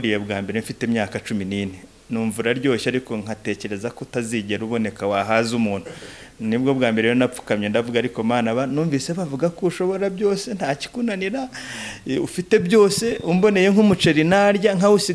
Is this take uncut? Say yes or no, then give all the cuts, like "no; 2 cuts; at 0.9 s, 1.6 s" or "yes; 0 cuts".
yes; 0 cuts